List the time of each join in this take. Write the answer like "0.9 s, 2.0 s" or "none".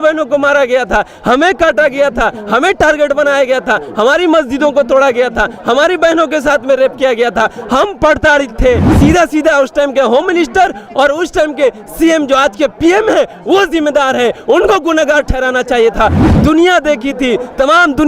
8.9 s, 16.2 s